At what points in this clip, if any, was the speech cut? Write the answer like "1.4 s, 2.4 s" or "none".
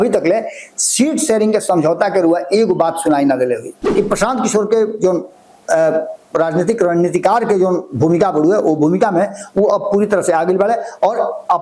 3.8 s

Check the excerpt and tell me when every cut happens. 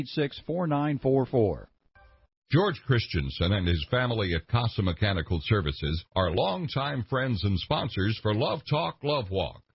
1.8 s

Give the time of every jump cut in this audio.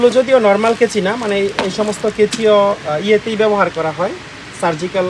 none

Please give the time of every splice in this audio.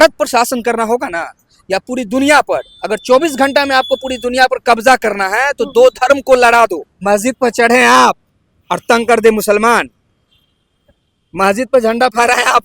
6.9 s

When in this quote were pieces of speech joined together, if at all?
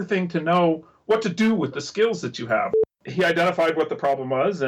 2.7 s

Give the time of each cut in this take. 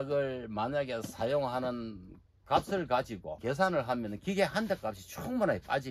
3.3 s

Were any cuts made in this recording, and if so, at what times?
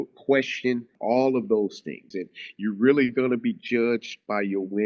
0.9 s, 2.2 s

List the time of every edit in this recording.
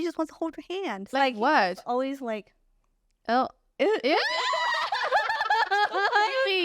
1.1 s

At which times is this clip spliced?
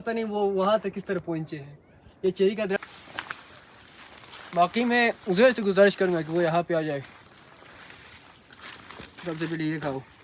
2.8 s

